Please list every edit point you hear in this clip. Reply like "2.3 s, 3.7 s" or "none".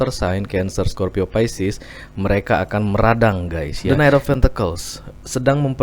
3.7 s